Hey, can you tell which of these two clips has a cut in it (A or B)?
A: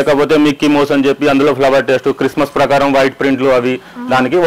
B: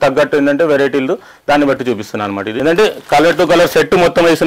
B